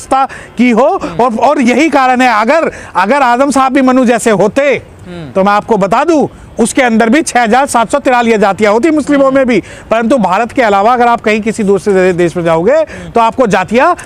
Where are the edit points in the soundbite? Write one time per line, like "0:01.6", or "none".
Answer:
none